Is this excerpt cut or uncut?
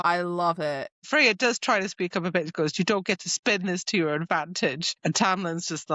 cut